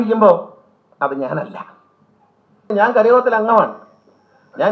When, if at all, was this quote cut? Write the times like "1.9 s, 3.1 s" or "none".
2.7 s